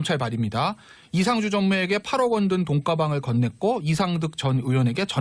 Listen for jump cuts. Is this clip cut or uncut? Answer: uncut